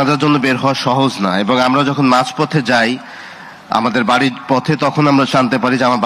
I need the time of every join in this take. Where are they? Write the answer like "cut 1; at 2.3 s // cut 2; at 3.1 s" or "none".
none